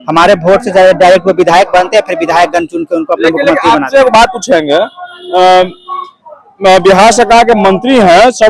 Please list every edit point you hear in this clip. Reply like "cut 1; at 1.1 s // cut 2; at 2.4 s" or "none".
none